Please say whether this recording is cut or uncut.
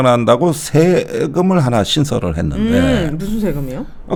uncut